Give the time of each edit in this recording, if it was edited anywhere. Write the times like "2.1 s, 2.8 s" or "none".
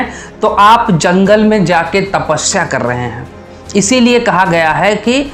none

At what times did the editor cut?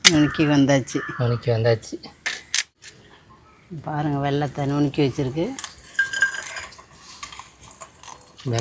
2.7 s

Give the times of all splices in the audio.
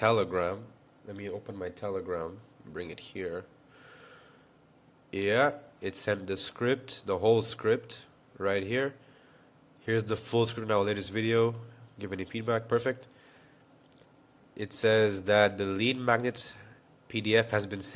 none

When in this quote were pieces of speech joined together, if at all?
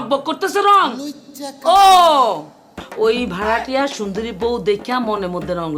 2.8 s

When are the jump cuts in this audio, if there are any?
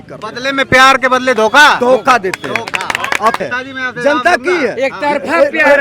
none

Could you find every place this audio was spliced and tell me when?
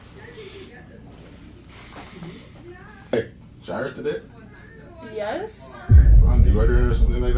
3.1 s

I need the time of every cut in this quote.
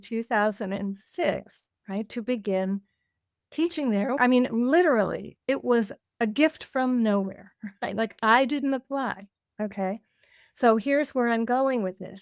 4.2 s

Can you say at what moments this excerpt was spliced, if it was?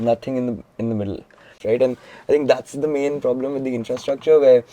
1.6 s

